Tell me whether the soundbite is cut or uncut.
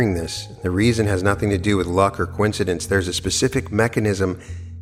uncut